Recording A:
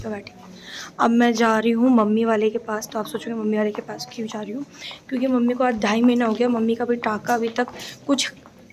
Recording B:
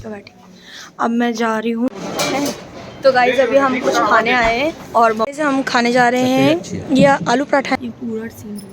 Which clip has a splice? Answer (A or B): B